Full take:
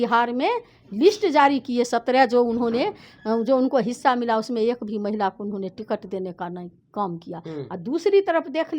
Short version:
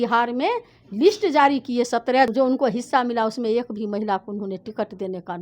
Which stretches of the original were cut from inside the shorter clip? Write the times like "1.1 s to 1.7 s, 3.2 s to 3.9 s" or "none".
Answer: 2.3 s to 3.4 s